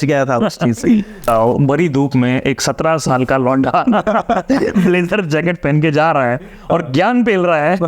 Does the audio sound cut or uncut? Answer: cut